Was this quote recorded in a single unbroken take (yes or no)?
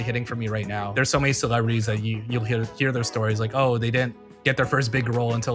no